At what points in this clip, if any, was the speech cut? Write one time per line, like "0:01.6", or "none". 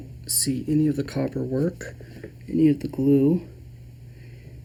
none